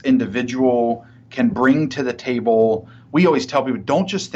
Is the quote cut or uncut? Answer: uncut